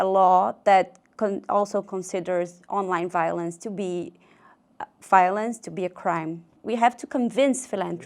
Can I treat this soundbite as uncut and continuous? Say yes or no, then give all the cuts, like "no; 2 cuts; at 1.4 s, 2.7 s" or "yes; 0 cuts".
no; 1 cut; at 6.6 s